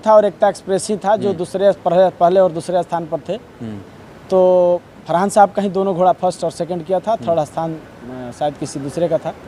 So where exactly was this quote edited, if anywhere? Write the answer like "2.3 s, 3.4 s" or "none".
none